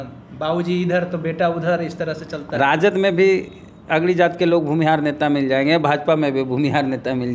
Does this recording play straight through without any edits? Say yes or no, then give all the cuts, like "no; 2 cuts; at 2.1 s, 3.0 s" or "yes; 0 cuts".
yes; 0 cuts